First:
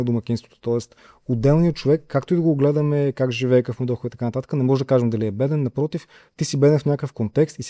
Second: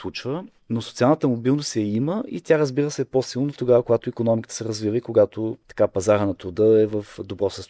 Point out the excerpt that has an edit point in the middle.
second; 1 cut; at 5.6 s

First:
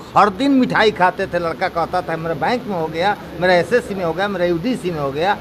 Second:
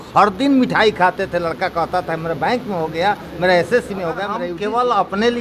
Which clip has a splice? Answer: second; 1 cut; at 4.5 s

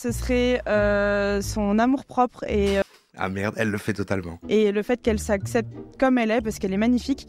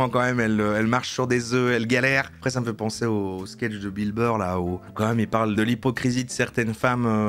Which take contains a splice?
second; 2 cuts; at 2.4 s, 5.6 s

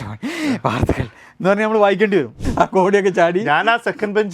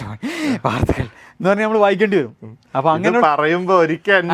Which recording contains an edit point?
first; 1 cut; at 2.4 s

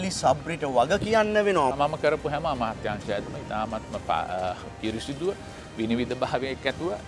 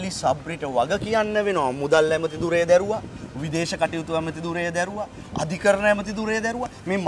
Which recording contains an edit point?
first; 1 cut; at 1.7 s

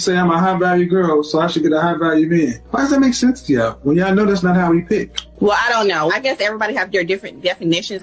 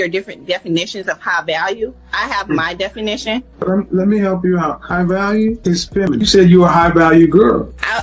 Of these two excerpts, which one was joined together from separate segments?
second; 1 cut; at 6.1 s

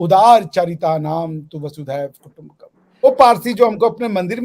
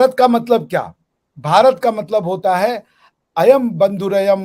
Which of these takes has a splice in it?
first; 1 cut; at 3.0 s

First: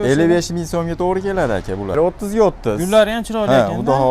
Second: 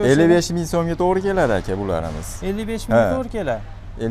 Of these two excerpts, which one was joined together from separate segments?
first; 1 cut; at 2.0 s

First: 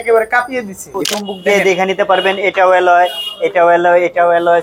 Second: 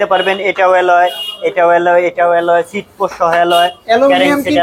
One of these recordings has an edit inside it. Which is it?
first; 1 cut; at 1.0 s

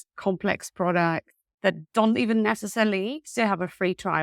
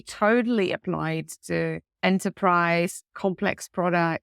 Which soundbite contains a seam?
second; 1 cut; at 1.9 s

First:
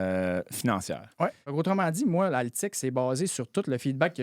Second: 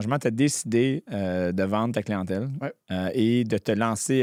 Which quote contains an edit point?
first; 1 cut; at 1.5 s

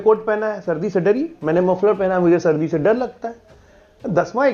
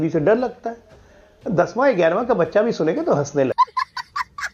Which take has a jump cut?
second; 1 cut; at 3.5 s

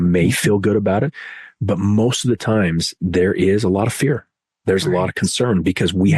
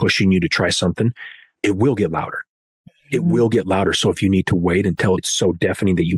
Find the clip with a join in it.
second; 2 cuts; at 1.5 s, 5.3 s

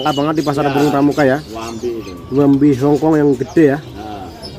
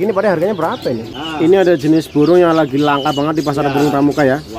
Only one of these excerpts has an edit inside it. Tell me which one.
second; 1 cut; at 1.1 s

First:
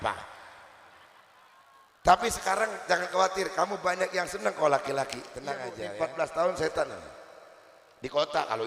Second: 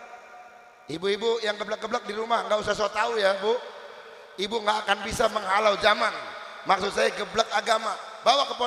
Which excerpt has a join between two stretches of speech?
first; 1 cut; at 5.8 s

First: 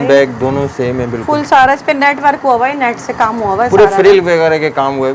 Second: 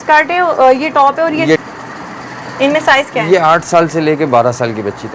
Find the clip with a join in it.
second; 1 cut; at 1.6 s

